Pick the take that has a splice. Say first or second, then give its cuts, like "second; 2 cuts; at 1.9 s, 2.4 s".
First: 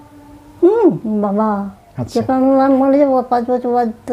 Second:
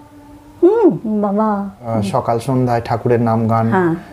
second; 1 cut; at 1.8 s